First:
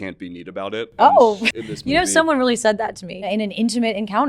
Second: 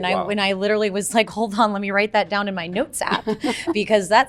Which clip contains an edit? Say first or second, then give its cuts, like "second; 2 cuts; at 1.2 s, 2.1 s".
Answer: first; 2 cuts; at 1.4 s, 3.3 s